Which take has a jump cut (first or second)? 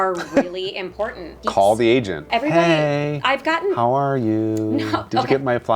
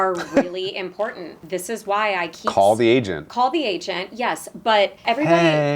first